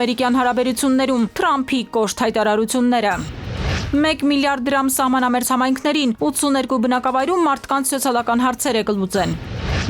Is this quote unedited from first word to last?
no; 1 cut; at 3.8 s

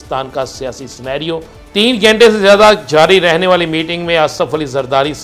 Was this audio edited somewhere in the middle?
yes; 1 cut; at 1.6 s

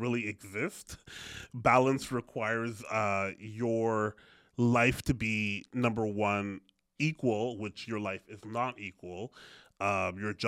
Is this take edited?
no; 0 cuts

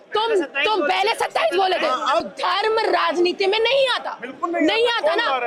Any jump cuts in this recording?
yes; 1 cut; at 2.3 s

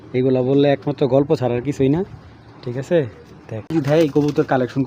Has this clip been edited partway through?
yes; 1 cut; at 3.7 s

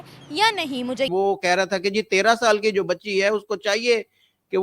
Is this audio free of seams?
no; 1 cut; at 1.1 s

